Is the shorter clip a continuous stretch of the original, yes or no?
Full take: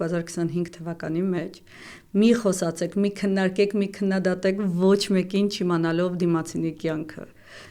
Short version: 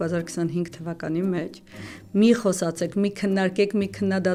yes